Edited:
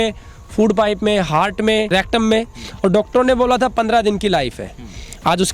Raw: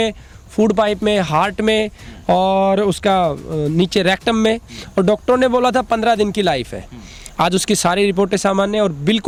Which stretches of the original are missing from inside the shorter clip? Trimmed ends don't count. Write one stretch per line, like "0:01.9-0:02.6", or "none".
0:01.9-0:04.0